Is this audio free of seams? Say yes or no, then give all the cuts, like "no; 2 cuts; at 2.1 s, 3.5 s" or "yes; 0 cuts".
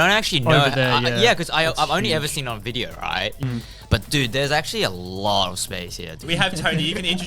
no; 2 cuts; at 3.4 s, 6.2 s